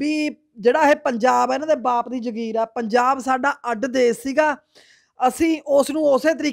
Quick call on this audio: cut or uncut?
uncut